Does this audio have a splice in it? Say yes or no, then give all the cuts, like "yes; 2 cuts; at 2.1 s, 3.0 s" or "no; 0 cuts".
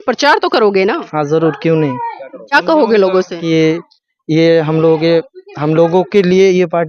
yes; 1 cut; at 2.5 s